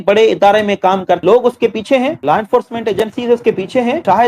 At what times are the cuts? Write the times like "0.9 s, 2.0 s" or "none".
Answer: 1.2 s